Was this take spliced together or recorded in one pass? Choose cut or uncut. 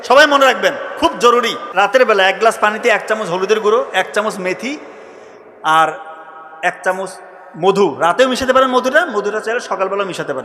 cut